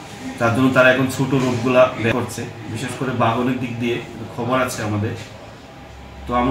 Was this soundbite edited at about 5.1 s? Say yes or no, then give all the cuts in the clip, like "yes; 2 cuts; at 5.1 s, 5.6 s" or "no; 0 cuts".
no; 1 cut; at 2.1 s